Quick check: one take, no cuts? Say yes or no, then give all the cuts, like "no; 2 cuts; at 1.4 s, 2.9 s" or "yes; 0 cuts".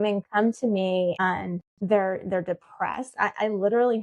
no; 1 cut; at 1.2 s